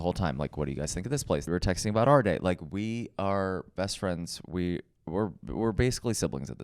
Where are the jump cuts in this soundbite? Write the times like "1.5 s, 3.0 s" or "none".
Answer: 1.4 s